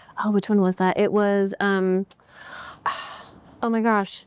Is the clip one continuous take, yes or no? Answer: yes